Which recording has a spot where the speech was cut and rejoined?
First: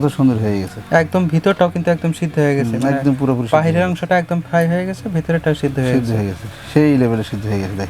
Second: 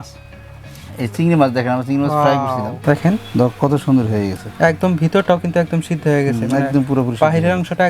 second; 1 cut; at 2.7 s

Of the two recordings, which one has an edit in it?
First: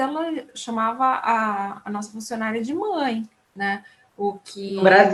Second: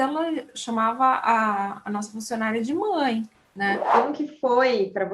second; 1 cut; at 3.9 s

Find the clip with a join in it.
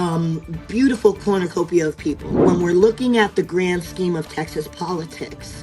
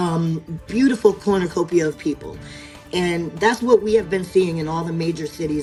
first; 1 cut; at 2.4 s

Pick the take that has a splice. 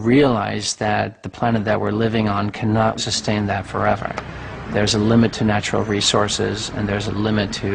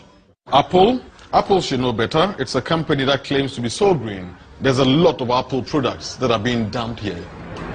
second; 1 cut; at 3.4 s

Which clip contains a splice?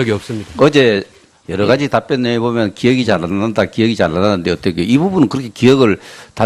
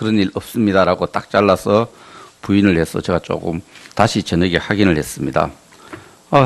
second; 1 cut; at 1.3 s

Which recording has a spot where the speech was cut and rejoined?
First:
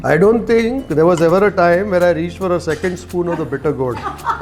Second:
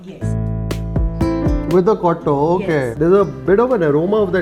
second; 2 cuts; at 1.7 s, 2.9 s

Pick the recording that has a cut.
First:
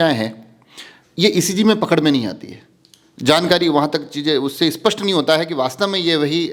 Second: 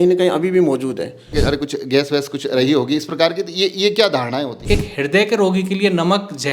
second; 2 cuts; at 1.3 s, 4.6 s

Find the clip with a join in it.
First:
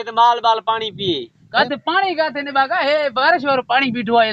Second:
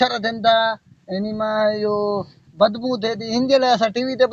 first; 1 cut; at 1.4 s

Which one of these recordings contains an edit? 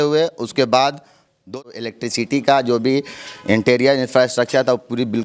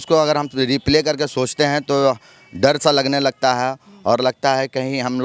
first; 1 cut; at 1.5 s

